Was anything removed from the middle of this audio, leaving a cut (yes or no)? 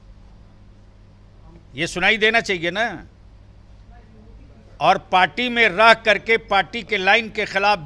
no